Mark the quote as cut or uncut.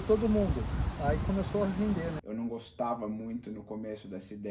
cut